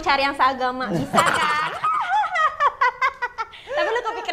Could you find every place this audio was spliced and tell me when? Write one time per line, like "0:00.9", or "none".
none